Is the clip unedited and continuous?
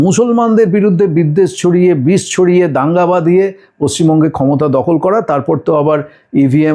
yes; 0 cuts

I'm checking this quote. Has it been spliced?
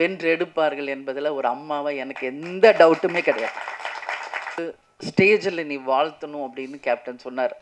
yes; 1 cut; at 4.6 s

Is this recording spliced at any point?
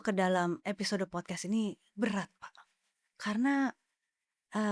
no; 0 cuts

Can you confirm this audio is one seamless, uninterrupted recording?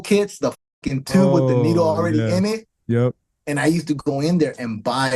yes; 0 cuts

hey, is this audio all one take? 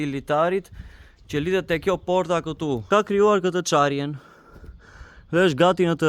no; 1 cut; at 2.8 s

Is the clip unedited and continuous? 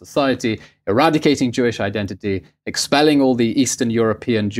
yes; 0 cuts

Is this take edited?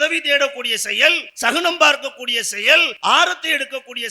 yes; 2 cuts; at 1.3 s, 2.9 s

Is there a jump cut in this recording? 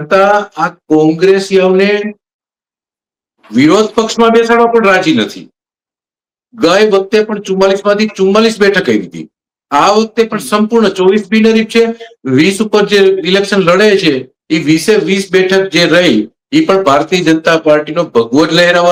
no; 0 cuts

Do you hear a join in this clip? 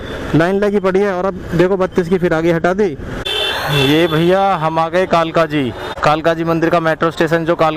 no; 0 cuts

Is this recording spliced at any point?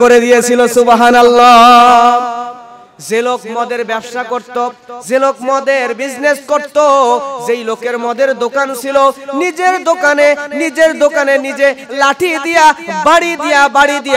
no; 0 cuts

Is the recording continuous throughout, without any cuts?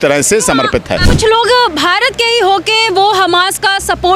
no; 1 cut; at 1.0 s

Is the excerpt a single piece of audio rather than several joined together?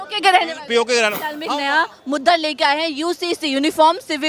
no; 1 cut; at 1.5 s

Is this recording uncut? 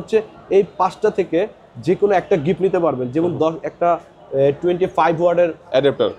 yes; 0 cuts

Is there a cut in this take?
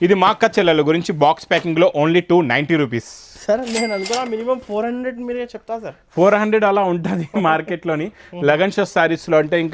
no; 0 cuts

